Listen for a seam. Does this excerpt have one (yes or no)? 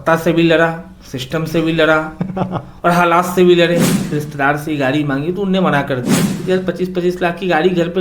yes